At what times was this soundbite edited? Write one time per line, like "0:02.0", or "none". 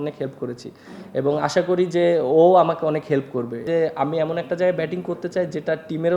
0:03.6

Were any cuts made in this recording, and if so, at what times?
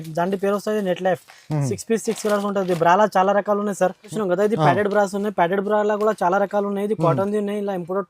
0:04.0

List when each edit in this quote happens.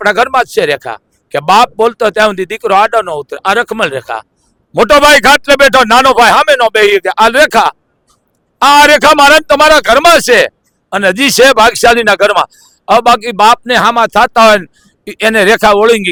none

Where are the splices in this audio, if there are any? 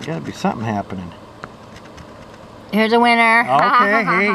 none

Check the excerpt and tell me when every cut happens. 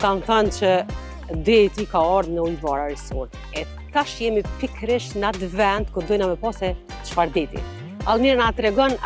none

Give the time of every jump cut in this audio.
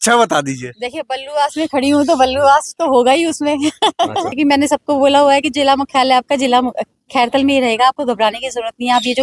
0:04.3

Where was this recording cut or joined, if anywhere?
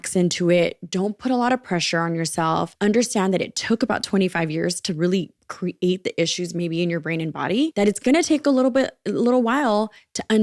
0:02.7
0:07.7

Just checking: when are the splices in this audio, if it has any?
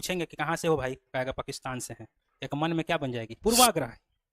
0:03.3

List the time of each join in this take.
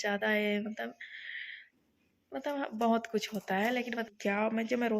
0:04.1

